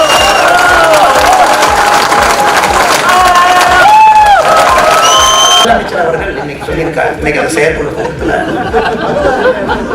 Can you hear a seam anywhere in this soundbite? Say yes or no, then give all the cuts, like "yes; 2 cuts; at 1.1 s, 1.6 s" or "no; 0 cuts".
yes; 1 cut; at 5.7 s